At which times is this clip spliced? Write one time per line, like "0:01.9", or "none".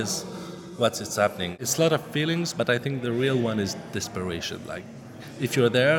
0:01.6